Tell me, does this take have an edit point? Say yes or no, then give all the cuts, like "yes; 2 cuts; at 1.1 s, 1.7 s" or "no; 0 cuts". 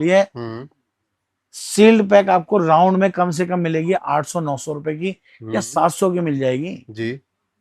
no; 0 cuts